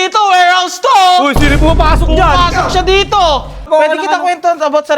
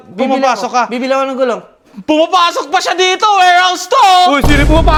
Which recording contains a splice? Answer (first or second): first